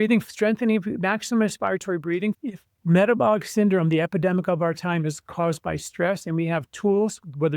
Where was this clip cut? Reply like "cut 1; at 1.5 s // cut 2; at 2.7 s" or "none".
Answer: cut 1; at 2.4 s